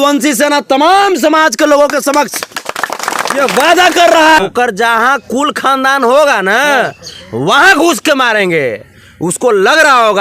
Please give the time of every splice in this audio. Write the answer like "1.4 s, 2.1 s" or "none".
4.4 s